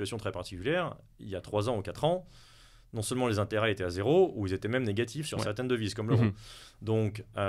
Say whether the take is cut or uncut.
uncut